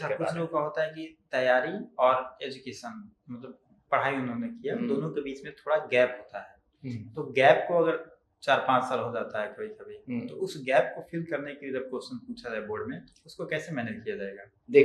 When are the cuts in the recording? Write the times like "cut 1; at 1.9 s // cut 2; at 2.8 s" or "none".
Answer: none

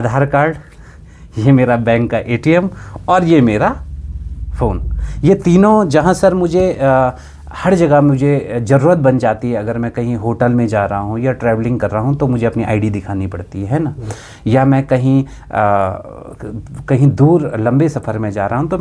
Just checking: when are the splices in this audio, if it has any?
none

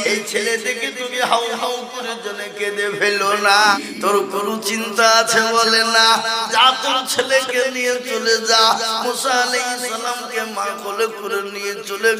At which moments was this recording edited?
cut 1; at 3.7 s

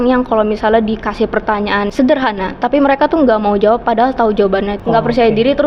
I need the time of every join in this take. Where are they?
cut 1; at 1.9 s // cut 2; at 4.7 s

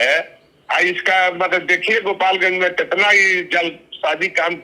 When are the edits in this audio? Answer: none

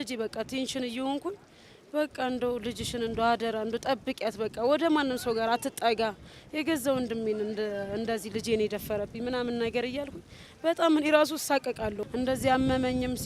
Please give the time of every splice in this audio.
none

